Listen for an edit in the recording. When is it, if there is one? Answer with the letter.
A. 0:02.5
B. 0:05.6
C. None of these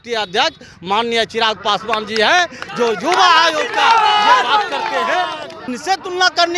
B